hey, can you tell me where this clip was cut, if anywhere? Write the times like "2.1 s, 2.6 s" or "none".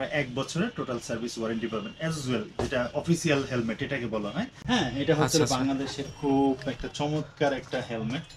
4.5 s